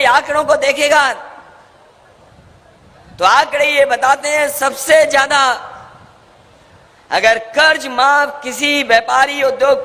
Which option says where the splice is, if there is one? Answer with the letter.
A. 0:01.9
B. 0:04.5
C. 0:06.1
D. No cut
D